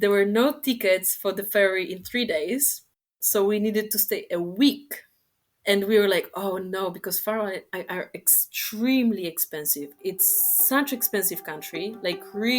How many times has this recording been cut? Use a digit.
0